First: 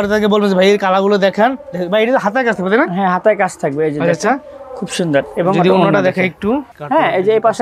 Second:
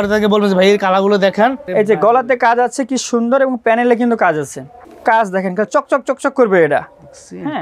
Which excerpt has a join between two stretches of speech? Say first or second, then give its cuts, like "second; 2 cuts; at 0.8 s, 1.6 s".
second; 2 cuts; at 1.6 s, 4.9 s